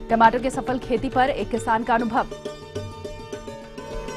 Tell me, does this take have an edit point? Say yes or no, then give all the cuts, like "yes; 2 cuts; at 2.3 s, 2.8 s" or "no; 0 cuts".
no; 0 cuts